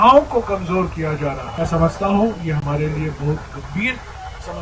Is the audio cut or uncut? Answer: cut